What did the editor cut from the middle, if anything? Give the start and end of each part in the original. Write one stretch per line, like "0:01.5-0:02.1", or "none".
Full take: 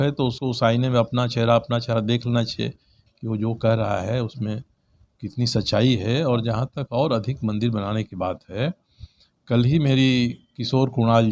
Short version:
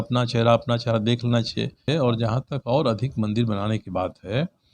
0:02.9-0:06.1